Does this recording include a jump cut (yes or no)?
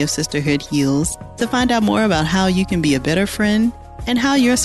no